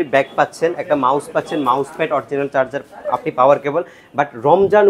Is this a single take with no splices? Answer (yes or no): yes